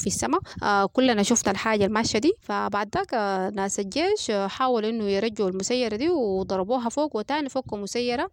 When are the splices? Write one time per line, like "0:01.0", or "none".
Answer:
none